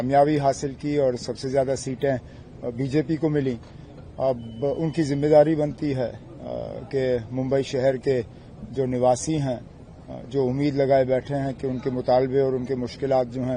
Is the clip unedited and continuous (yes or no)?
yes